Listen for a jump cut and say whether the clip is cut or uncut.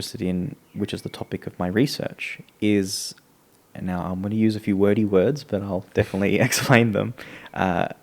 uncut